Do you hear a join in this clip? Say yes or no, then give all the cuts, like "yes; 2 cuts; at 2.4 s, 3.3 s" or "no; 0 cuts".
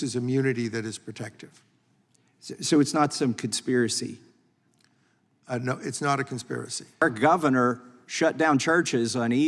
yes; 1 cut; at 7.0 s